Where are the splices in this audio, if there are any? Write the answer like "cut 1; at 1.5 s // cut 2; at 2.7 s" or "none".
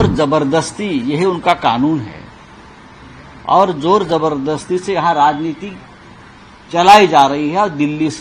none